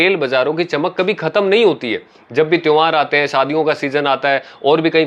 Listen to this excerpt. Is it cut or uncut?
uncut